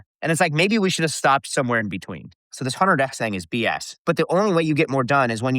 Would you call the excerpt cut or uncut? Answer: cut